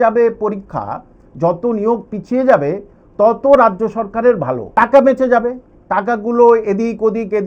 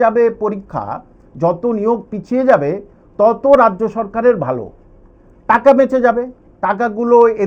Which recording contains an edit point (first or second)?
first